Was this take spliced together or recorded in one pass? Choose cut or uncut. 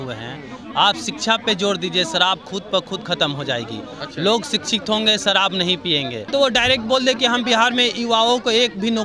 cut